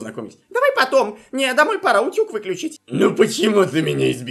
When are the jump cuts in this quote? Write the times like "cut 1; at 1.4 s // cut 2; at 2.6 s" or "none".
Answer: cut 1; at 2.8 s